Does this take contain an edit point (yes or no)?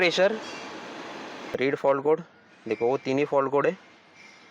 yes